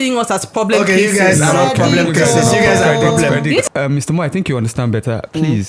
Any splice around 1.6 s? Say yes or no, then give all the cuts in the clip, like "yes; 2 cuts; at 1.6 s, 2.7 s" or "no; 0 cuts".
no; 1 cut; at 3.7 s